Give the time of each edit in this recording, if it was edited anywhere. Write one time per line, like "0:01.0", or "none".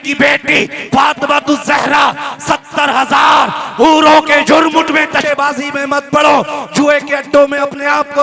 0:05.2